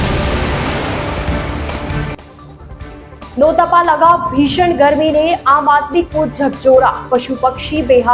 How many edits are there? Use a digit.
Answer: 0